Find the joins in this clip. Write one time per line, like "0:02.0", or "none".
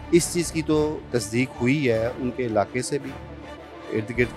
0:01.0